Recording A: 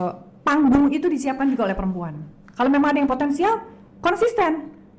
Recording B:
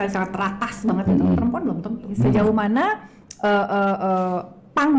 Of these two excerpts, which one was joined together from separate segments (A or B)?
B